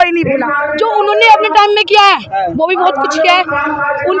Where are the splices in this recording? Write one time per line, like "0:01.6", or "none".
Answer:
none